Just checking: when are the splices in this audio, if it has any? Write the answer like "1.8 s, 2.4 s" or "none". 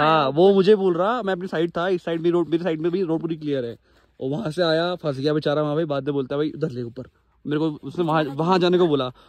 none